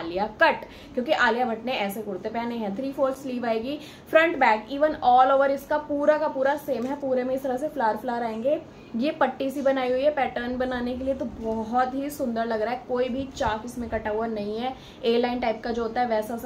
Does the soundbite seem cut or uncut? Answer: uncut